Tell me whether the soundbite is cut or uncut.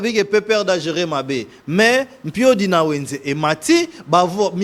uncut